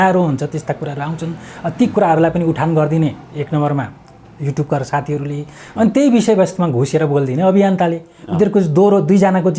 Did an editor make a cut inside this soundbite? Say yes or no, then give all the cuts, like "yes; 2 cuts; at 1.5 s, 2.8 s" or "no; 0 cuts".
no; 0 cuts